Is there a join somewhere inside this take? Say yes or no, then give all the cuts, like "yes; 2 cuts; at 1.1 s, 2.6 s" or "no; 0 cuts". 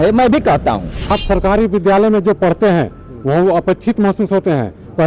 yes; 1 cut; at 1.2 s